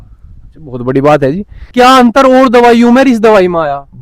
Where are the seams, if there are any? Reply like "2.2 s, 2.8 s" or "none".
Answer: 1.7 s